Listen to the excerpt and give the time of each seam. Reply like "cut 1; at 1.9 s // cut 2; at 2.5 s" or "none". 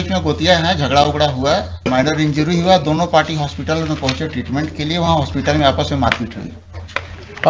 cut 1; at 1.8 s